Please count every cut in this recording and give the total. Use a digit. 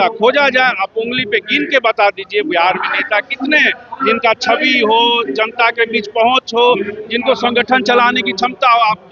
0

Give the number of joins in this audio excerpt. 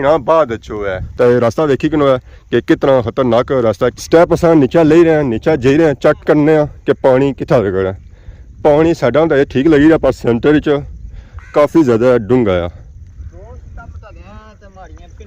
2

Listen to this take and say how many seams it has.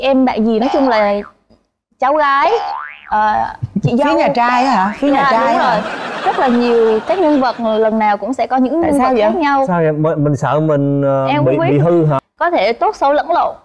1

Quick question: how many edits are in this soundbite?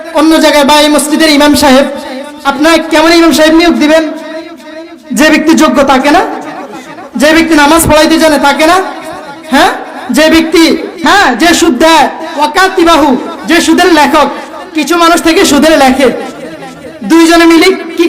1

